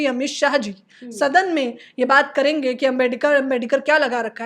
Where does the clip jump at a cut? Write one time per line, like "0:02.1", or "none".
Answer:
none